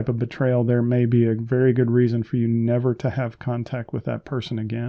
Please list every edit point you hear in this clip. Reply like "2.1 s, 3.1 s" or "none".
none